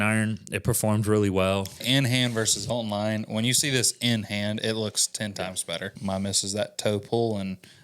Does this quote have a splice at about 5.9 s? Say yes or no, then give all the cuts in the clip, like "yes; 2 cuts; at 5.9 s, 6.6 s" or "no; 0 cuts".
yes; 2 cuts; at 1.8 s, 5.9 s